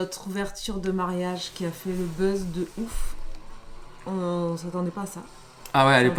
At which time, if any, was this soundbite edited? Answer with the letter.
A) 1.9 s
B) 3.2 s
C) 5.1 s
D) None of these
D